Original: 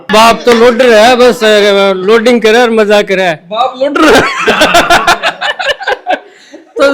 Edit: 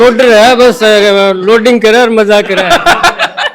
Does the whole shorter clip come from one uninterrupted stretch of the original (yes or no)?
no